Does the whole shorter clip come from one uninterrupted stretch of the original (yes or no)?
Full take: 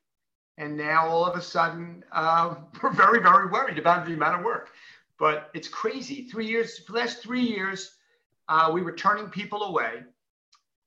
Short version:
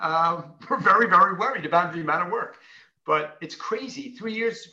yes